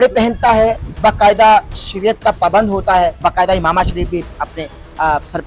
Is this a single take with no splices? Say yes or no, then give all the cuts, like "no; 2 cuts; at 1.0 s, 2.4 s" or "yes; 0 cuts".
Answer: no; 2 cuts; at 0.8 s, 3.2 s